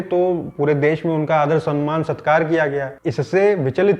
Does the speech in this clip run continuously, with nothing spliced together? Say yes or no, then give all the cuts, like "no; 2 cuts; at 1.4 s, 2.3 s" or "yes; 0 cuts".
yes; 0 cuts